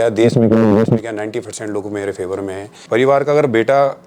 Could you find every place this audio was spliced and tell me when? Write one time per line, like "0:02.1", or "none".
0:02.7